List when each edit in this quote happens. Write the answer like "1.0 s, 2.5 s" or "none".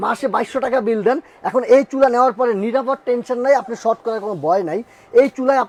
none